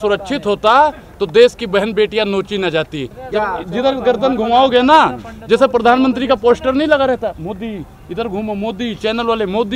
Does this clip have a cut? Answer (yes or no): yes